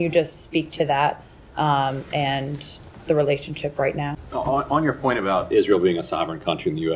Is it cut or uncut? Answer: cut